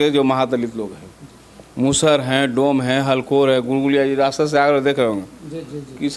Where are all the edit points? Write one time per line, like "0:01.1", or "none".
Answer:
none